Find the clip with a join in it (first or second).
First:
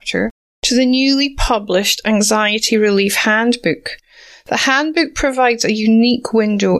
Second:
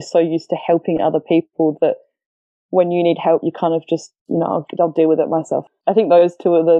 second